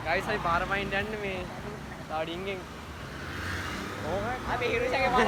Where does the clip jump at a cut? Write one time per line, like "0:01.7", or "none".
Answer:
none